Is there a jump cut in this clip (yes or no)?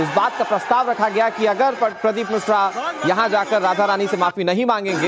yes